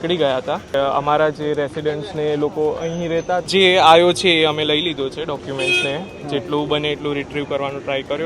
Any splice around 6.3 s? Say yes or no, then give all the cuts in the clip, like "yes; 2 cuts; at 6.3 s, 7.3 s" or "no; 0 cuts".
no; 2 cuts; at 0.7 s, 3.4 s